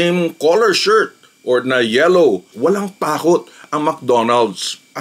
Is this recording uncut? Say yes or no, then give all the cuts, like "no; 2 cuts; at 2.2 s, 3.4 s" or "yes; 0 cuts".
no; 1 cut; at 2.5 s